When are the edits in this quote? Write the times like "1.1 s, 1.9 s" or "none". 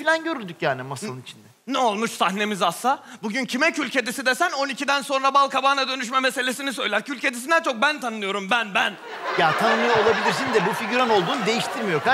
5.7 s